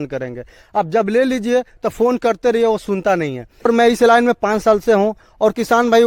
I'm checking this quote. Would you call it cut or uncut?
cut